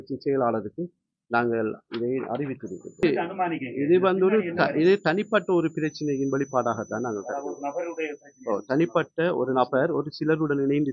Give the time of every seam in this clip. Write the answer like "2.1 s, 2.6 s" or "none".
3.0 s

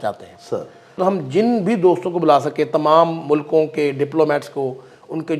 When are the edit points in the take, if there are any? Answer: 1.0 s

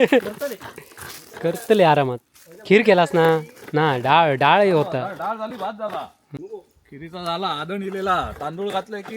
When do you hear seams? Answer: 6.2 s

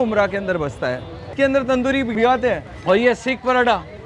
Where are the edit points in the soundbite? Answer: 1.1 s, 2.1 s

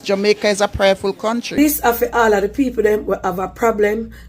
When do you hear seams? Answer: 1.6 s

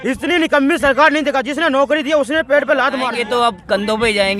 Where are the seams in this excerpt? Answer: 3.2 s

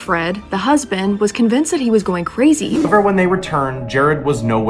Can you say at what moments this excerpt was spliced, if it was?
2.9 s

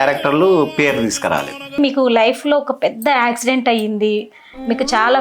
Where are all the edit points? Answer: 1.8 s

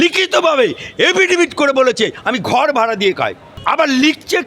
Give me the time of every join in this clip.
3.5 s

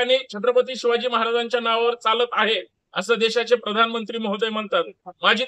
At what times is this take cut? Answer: none

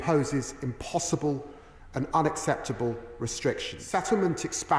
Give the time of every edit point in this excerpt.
3.7 s

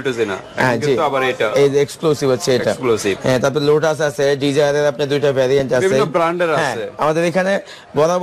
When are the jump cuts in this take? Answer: none

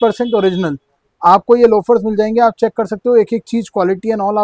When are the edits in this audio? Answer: none

